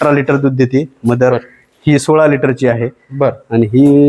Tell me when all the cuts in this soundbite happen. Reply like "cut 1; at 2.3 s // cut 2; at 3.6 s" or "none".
none